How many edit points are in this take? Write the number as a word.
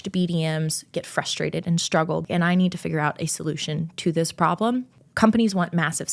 two